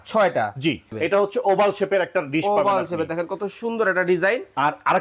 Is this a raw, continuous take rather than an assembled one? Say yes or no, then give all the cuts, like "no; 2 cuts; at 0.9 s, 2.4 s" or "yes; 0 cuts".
no; 1 cut; at 0.9 s